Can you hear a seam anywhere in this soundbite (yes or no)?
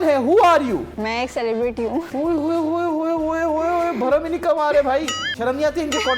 yes